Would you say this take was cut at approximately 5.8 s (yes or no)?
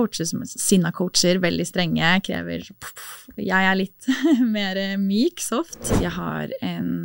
yes